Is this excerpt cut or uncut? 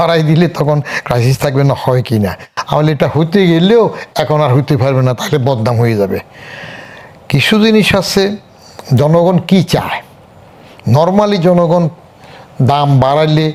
uncut